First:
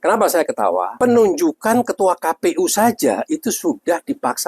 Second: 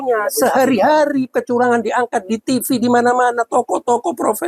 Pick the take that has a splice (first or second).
first